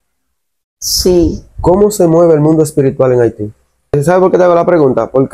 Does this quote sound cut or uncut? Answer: cut